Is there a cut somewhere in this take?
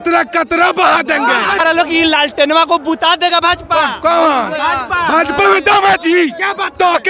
yes; 1 cut; at 1.6 s

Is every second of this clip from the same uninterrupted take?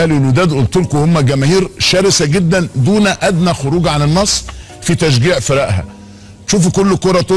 yes; 0 cuts

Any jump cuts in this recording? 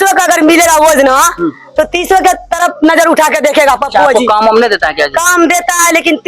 no; 0 cuts

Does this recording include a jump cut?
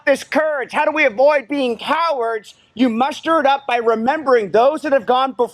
no; 0 cuts

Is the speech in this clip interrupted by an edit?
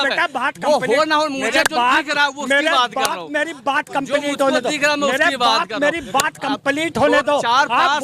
no; 0 cuts

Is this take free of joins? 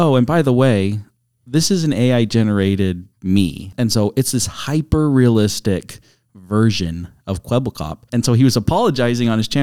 no; 2 cuts; at 3.7 s, 8.0 s

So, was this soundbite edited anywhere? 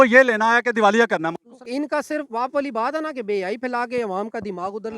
yes; 1 cut; at 1.5 s

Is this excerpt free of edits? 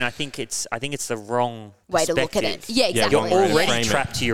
no; 1 cut; at 1.7 s

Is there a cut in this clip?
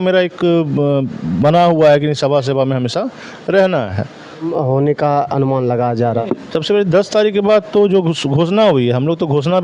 yes; 1 cut; at 4.5 s

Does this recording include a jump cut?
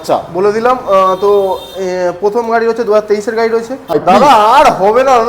yes; 1 cut; at 4.0 s

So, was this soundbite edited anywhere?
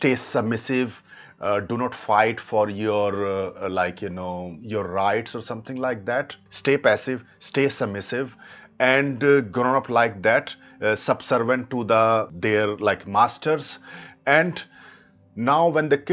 yes; 2 cuts; at 6.4 s, 12.3 s

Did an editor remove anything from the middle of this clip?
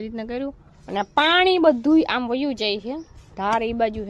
no; 0 cuts

